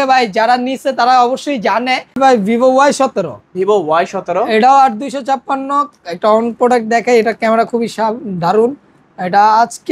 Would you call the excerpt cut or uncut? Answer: cut